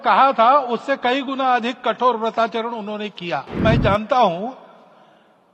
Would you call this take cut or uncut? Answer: cut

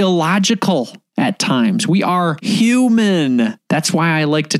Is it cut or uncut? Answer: cut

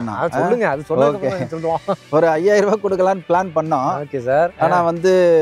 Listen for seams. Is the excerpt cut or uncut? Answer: uncut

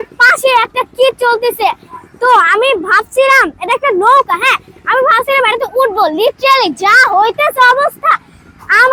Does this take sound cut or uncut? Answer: uncut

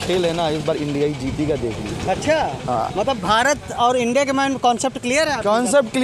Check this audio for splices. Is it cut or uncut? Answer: uncut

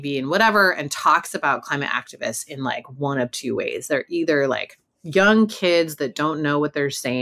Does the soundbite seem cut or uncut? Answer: uncut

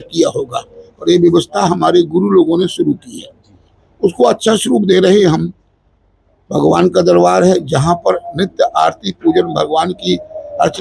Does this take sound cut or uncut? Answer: uncut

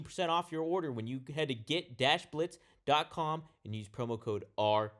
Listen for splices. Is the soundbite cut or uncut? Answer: uncut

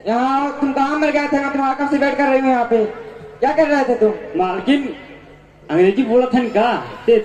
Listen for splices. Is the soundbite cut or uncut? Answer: uncut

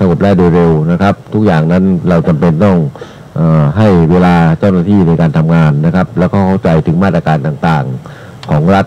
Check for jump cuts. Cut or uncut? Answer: uncut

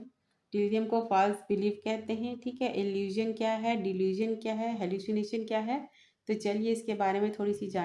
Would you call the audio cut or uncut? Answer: uncut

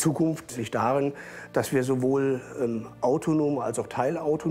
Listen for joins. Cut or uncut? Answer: uncut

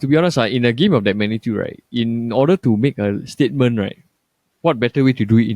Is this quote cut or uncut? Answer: cut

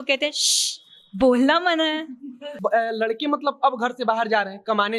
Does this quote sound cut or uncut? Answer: cut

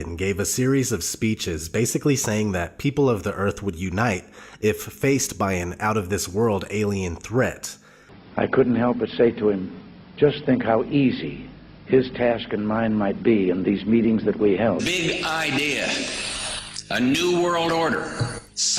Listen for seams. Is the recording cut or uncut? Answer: uncut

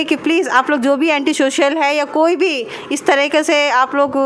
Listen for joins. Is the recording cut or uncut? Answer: uncut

